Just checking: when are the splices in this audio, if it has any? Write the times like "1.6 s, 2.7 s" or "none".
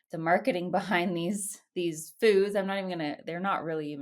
none